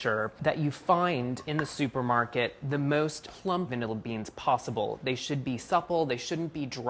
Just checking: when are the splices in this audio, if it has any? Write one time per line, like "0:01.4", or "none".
0:01.2